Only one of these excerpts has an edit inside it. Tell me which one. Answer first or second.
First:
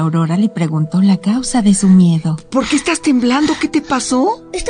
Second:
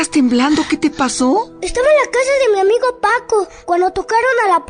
second